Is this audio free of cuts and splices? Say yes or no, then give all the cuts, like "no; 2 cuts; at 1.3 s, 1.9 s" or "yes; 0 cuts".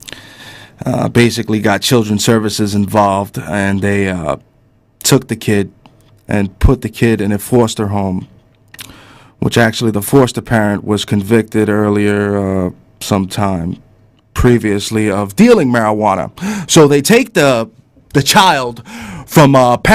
no; 1 cut; at 16.0 s